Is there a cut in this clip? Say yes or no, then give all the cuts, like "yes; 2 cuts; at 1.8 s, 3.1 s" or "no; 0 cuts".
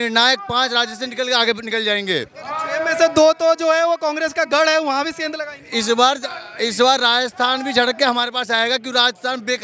no; 0 cuts